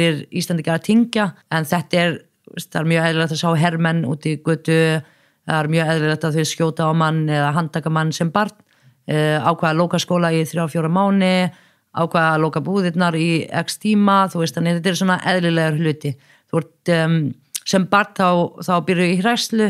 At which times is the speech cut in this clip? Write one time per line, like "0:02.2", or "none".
0:01.4